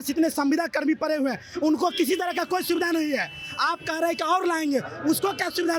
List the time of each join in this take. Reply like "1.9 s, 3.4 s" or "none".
none